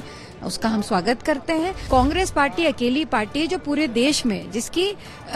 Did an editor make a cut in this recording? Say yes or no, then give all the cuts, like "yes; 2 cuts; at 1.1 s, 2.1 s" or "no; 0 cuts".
yes; 1 cut; at 1.8 s